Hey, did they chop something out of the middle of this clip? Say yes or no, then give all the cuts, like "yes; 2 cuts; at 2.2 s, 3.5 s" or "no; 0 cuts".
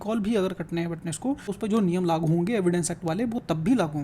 yes; 1 cut; at 1.5 s